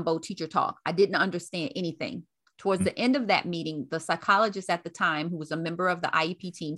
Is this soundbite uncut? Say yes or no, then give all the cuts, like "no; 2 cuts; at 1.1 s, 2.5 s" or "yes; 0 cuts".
yes; 0 cuts